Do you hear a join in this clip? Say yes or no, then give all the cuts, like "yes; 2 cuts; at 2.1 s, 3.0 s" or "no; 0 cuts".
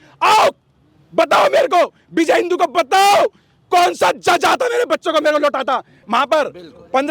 yes; 1 cut; at 5.9 s